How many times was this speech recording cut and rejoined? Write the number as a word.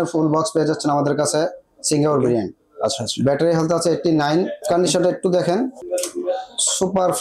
zero